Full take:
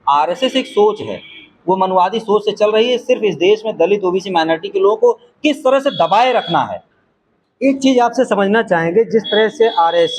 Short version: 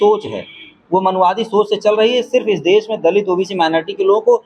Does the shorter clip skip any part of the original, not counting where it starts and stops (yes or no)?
no